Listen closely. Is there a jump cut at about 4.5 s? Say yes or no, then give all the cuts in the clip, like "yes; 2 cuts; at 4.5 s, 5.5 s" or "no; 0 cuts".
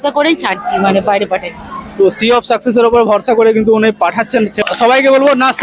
yes; 1 cut; at 4.5 s